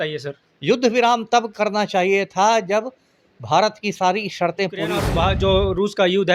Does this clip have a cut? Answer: yes; 1 cut; at 5.0 s

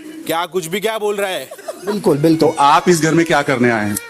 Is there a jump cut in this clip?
yes; 1 cut; at 2.0 s

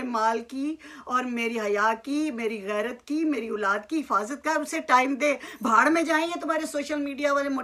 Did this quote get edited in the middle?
no; 0 cuts

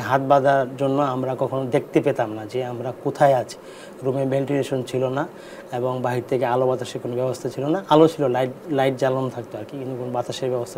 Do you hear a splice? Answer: no; 0 cuts

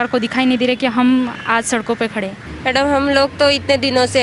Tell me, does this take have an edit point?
yes; 1 cut; at 2.4 s

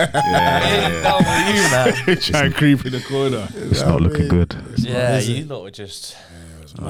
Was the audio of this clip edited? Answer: no; 0 cuts

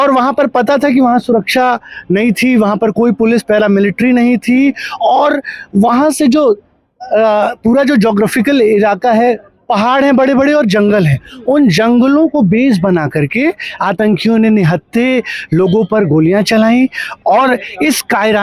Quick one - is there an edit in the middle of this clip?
no; 0 cuts

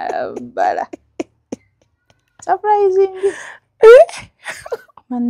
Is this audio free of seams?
yes; 0 cuts

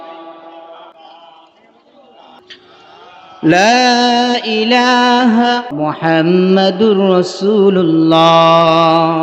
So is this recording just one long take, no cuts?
no; 3 cuts; at 0.9 s, 2.4 s, 5.7 s

